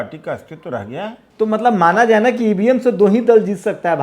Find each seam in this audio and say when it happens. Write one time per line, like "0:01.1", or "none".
0:01.2